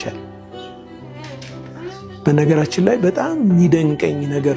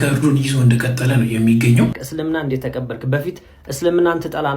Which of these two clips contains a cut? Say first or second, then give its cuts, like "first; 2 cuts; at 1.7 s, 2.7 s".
second; 1 cut; at 2.0 s